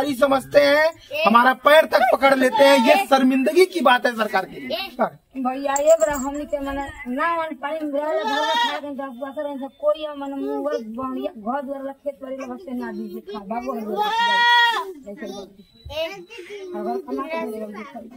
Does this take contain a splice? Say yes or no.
no